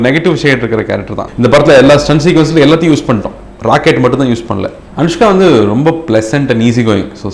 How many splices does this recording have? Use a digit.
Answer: 2